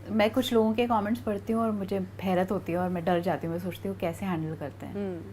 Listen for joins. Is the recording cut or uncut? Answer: uncut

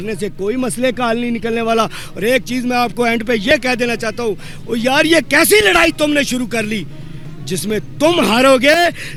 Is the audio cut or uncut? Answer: uncut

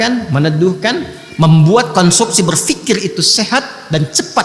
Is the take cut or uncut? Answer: uncut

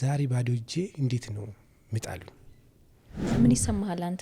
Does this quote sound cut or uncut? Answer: cut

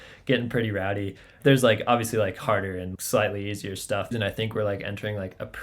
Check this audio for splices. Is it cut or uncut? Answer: cut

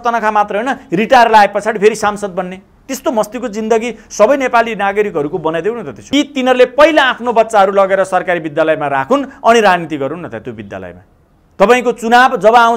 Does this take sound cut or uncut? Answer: cut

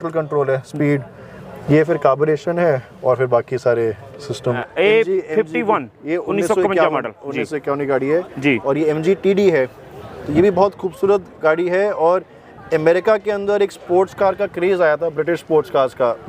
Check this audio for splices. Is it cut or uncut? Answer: cut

